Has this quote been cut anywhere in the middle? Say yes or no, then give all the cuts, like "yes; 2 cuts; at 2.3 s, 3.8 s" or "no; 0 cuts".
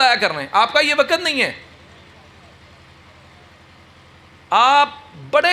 no; 0 cuts